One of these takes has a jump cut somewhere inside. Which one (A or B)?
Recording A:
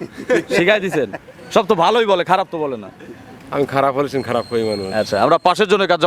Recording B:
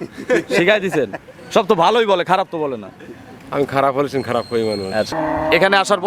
B